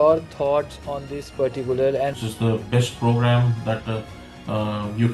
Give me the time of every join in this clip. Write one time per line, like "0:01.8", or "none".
0:02.6